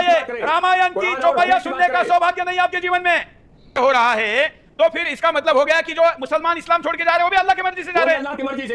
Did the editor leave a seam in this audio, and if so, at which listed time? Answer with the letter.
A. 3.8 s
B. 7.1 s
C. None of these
A